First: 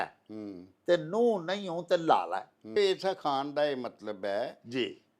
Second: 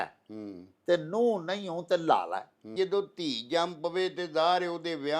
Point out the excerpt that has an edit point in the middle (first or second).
second